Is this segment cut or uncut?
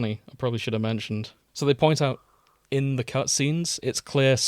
cut